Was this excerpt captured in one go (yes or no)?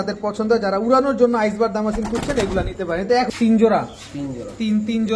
no